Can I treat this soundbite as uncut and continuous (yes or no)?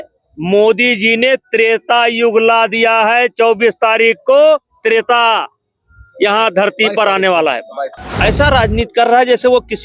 no